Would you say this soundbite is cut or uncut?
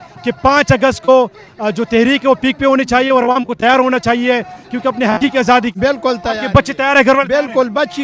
cut